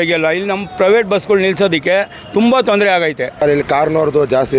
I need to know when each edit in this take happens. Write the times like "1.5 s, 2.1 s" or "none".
3.4 s